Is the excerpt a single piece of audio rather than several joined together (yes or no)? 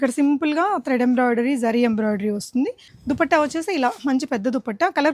no